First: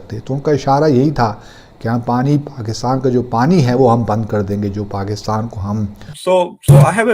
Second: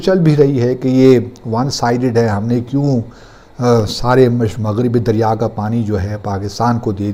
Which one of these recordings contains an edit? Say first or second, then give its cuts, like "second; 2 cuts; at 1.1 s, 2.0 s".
first; 1 cut; at 6.1 s